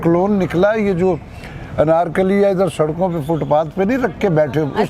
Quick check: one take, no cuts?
yes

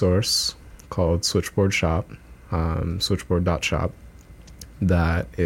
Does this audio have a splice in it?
no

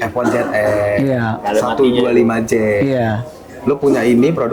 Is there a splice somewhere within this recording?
no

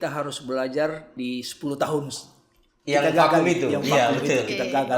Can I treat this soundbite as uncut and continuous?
no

